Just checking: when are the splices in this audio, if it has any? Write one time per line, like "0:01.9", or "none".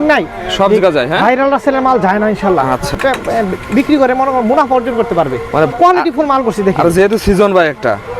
0:02.9
0:05.7